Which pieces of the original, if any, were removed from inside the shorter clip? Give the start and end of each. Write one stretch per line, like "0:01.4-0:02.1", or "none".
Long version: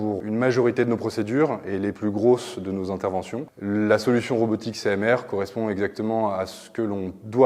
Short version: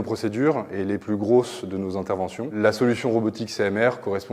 0:03.5-0:03.8